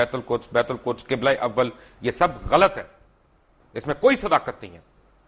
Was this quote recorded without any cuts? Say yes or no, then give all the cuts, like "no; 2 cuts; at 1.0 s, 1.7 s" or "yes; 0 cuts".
yes; 0 cuts